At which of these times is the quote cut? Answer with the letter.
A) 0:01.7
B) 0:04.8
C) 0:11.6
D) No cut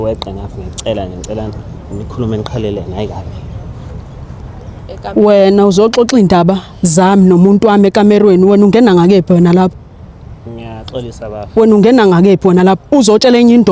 B